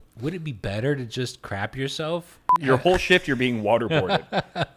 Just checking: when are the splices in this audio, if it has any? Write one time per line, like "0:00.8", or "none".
0:02.5